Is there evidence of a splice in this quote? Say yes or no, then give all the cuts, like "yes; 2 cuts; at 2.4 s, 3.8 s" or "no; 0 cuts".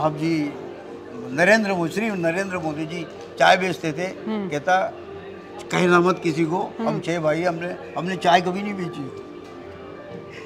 no; 0 cuts